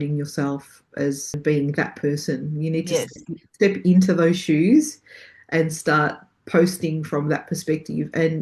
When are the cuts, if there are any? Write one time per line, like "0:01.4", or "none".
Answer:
0:01.4